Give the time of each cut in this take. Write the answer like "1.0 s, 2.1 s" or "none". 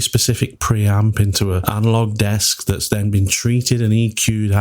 1.6 s

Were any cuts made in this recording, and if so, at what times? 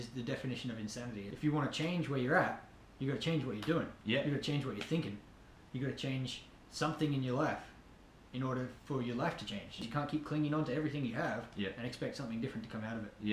1.2 s, 9.8 s

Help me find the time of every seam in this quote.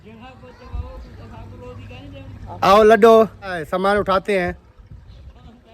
3.6 s

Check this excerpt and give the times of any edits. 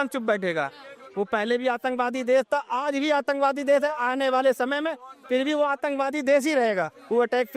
none

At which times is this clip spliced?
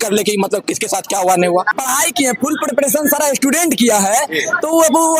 1.7 s

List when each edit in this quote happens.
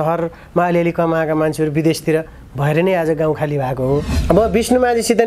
4.1 s

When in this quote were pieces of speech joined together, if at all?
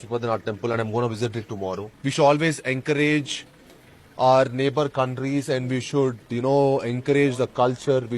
1.9 s

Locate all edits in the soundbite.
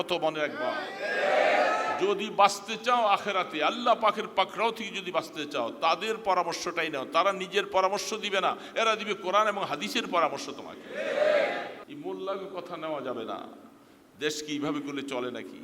11.8 s

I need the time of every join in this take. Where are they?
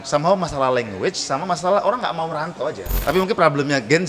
3.0 s

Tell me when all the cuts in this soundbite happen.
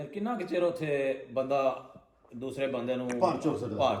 none

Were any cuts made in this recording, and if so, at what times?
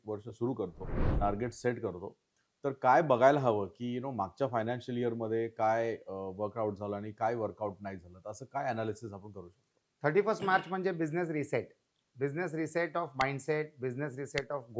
none

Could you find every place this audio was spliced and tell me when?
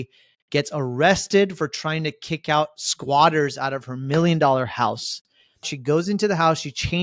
5.7 s

